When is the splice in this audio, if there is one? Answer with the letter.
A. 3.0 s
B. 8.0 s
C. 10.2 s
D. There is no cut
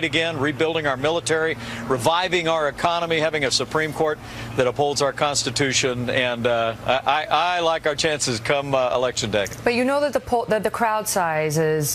A